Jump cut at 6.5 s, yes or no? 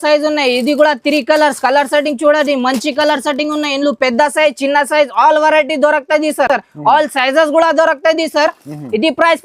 no